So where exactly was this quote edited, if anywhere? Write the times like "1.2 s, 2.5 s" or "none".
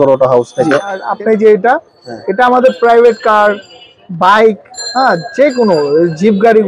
1.1 s